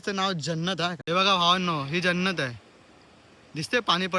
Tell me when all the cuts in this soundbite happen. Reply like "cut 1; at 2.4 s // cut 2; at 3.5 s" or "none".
cut 1; at 1.0 s